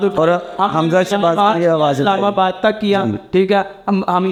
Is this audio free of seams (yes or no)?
yes